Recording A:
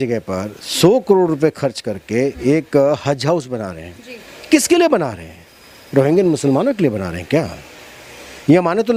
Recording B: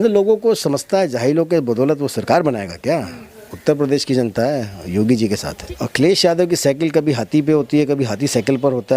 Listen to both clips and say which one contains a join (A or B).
B